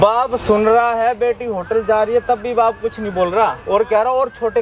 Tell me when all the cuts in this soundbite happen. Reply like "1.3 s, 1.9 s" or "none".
none